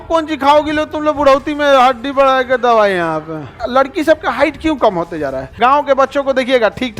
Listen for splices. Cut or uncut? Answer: cut